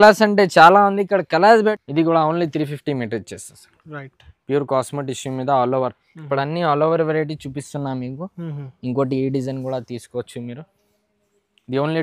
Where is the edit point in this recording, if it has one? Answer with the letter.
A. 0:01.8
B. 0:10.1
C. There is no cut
A